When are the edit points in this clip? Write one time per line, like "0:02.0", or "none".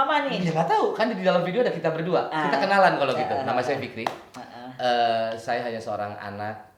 none